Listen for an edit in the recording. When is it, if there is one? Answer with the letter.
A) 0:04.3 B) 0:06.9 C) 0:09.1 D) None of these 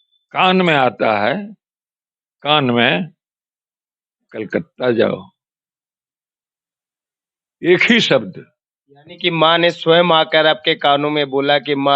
D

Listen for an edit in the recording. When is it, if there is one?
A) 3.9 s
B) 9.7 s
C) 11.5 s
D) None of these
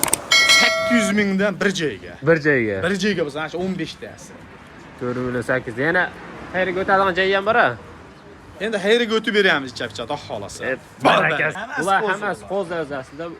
C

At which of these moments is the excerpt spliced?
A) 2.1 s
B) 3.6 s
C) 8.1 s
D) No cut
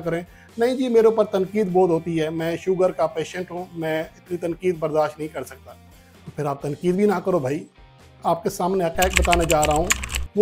C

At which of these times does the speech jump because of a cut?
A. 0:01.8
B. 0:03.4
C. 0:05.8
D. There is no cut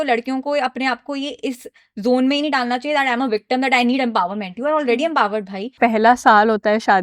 C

